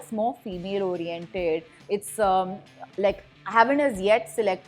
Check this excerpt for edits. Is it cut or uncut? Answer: uncut